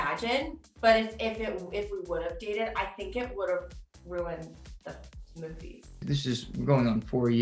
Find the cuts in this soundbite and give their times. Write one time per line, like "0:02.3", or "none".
0:06.0